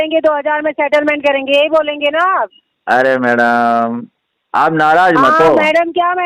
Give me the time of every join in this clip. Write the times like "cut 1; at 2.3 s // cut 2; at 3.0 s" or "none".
none

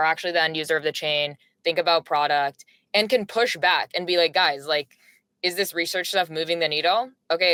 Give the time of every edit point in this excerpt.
none

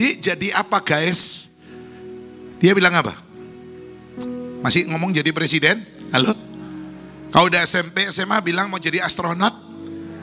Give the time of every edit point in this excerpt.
none

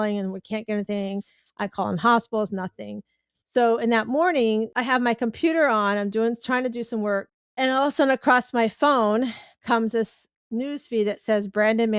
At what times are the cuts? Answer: cut 1; at 4.7 s // cut 2; at 7.4 s

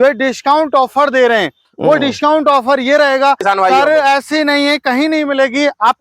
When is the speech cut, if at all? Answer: cut 1; at 3.4 s

